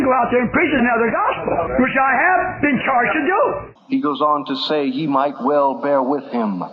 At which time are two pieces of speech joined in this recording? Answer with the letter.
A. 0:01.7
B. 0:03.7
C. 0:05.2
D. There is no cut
B